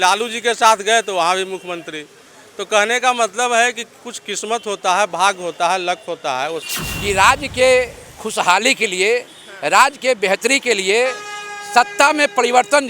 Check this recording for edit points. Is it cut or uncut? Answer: cut